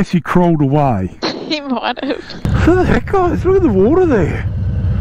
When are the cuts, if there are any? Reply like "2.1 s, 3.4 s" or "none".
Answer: 2.4 s